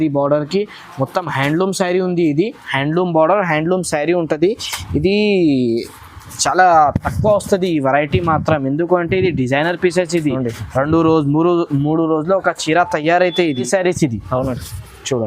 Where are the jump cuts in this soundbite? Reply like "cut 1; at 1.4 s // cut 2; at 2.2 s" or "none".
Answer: cut 1; at 13.7 s